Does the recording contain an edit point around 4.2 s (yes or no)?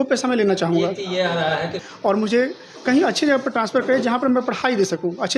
no